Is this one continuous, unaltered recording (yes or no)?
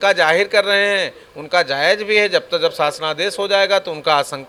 yes